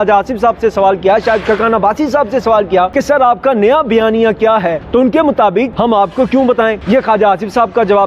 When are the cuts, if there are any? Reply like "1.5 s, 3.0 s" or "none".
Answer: 2.9 s, 4.8 s, 5.7 s, 6.8 s